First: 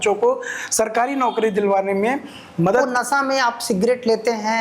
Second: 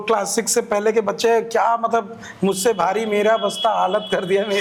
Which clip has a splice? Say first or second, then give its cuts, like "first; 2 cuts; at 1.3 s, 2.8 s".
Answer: first; 1 cut; at 2.8 s